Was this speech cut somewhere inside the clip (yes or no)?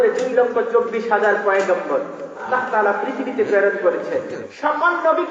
yes